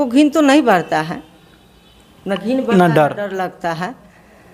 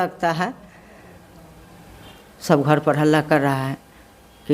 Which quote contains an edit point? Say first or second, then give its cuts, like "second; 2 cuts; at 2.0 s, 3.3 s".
second; 1 cut; at 2.1 s